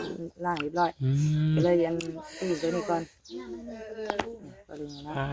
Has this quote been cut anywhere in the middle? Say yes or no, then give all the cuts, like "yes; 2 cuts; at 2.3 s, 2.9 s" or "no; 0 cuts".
no; 0 cuts